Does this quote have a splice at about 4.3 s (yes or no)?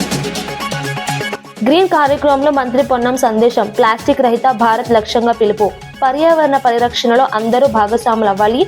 no